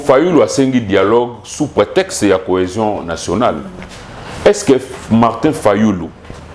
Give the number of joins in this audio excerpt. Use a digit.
0